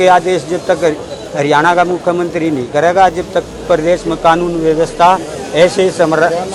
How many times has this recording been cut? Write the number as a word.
zero